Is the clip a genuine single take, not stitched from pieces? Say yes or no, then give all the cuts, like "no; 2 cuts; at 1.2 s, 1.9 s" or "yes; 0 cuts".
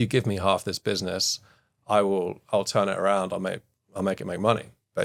yes; 0 cuts